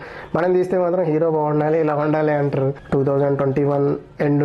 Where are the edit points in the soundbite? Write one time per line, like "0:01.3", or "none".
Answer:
0:02.8